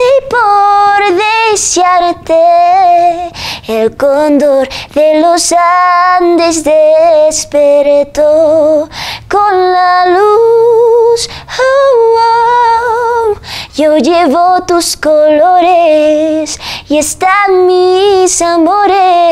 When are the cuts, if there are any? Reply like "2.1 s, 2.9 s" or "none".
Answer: none